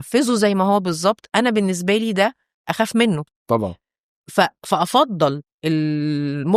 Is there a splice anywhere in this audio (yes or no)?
yes